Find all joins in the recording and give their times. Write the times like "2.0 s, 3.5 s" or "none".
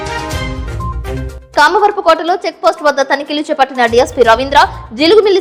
none

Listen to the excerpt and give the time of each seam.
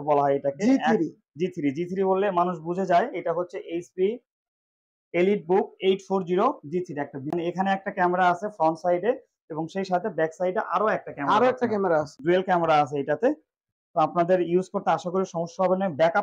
7.3 s

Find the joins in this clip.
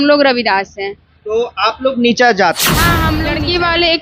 3.1 s

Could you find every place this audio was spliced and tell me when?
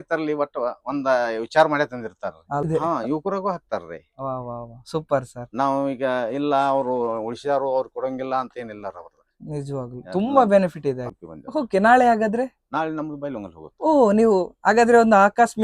2.6 s, 11.0 s

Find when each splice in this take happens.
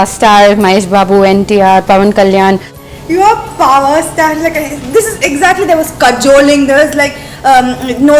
2.8 s

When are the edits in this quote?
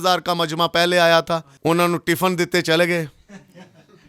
1.5 s

